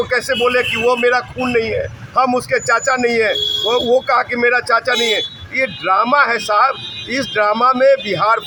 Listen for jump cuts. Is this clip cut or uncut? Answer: uncut